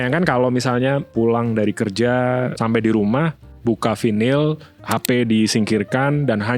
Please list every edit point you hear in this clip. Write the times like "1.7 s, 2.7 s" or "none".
1.1 s, 2.5 s, 3.5 s, 4.7 s